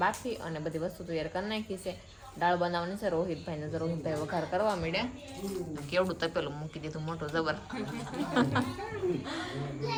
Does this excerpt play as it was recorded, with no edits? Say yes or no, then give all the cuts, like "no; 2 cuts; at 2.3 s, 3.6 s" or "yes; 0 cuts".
yes; 0 cuts